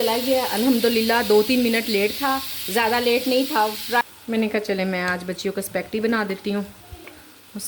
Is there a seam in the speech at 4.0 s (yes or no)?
yes